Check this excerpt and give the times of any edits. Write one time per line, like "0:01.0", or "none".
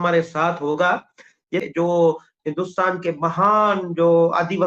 0:01.6